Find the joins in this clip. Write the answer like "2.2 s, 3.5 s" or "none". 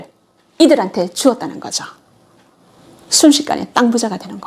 none